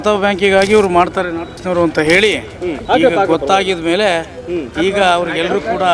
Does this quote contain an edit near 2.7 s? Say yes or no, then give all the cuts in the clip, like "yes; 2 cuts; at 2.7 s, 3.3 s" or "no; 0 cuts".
yes; 2 cuts; at 1.6 s, 2.7 s